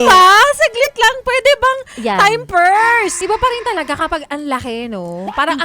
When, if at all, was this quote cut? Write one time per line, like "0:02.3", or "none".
0:03.2

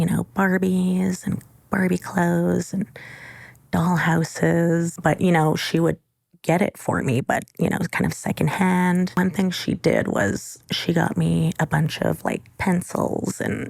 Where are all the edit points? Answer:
0:04.9
0:09.2

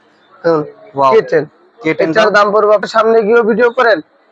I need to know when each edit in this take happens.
0:02.9

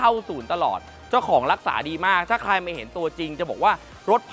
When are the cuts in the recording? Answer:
none

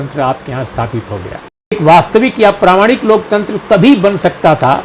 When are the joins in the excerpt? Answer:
0:01.8

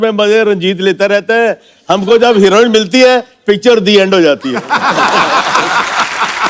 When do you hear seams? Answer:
none

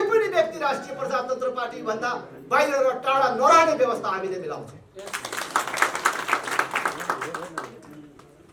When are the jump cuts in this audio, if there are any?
none

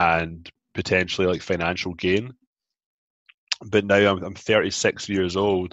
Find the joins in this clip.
none

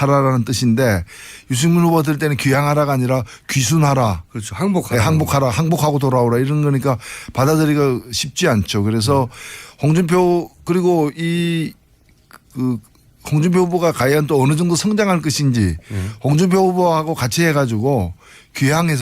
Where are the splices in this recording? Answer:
0:04.1

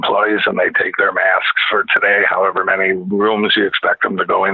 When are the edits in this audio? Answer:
none

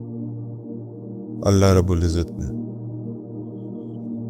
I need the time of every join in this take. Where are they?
0:01.1
0:02.5

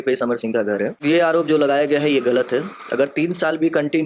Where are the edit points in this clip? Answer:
0:01.0

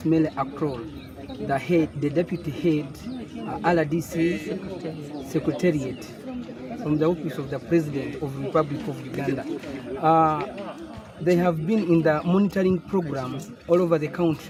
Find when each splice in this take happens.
none

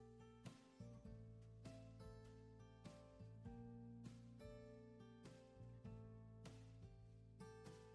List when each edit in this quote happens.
none

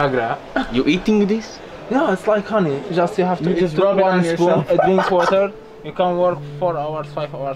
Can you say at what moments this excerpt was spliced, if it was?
none

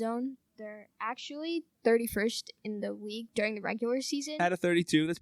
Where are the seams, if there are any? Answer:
0:04.3

